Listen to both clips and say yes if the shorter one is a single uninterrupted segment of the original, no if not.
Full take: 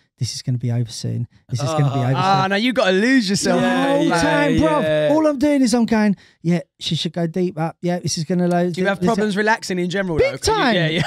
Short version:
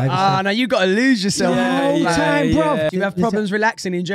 no